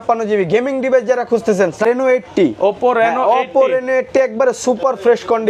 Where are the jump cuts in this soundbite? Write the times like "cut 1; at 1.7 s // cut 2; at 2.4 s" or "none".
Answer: cut 1; at 1.8 s